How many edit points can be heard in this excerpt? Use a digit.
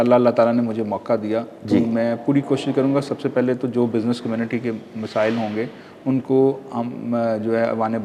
0